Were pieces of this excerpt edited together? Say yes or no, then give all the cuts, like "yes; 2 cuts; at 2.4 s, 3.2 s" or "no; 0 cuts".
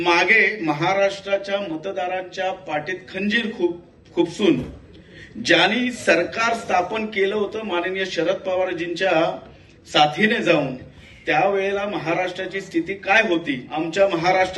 yes; 1 cut; at 13.7 s